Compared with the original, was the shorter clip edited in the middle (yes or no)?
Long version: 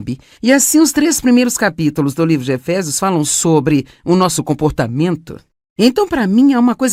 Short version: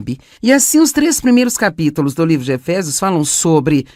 no